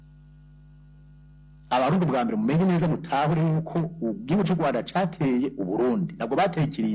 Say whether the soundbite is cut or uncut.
uncut